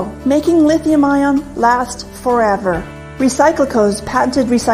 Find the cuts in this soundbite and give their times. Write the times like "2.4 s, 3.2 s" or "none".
1.9 s